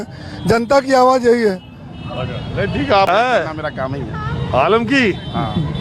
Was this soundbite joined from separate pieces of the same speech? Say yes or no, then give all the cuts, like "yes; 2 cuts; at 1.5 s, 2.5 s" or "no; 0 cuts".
yes; 1 cut; at 3.1 s